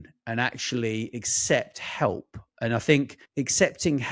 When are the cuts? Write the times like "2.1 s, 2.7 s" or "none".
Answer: 3.2 s